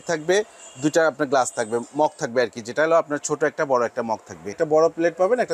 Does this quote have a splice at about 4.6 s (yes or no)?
yes